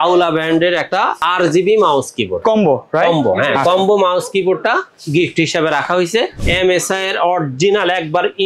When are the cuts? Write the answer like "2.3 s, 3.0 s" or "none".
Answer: 1.2 s, 6.4 s